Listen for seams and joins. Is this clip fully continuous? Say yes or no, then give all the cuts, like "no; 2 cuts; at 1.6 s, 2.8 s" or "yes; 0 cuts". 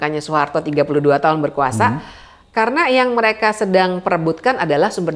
yes; 0 cuts